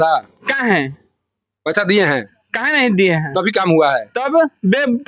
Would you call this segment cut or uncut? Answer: uncut